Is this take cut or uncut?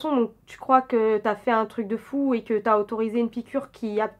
uncut